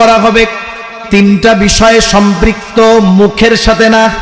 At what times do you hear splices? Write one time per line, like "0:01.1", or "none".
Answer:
0:01.0